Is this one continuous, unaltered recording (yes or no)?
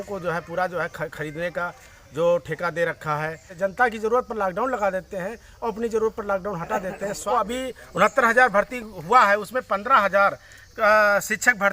no